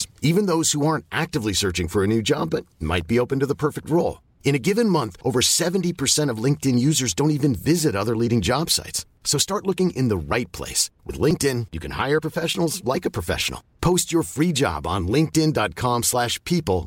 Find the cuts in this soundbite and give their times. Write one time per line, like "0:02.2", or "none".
none